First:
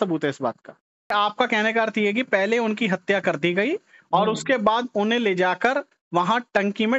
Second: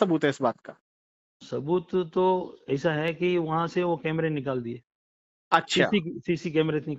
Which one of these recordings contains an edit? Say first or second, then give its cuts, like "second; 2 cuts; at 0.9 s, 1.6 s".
first; 1 cut; at 1.1 s